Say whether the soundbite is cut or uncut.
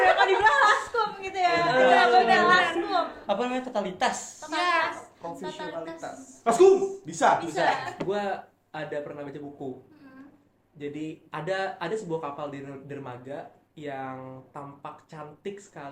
cut